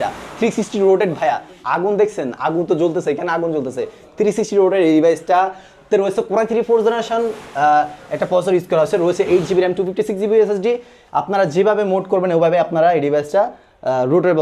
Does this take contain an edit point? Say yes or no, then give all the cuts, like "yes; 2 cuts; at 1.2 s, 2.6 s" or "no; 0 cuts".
no; 0 cuts